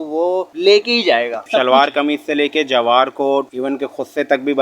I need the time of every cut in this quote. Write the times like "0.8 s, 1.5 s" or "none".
1.4 s